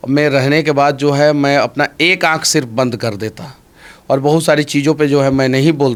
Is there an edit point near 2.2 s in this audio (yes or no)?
no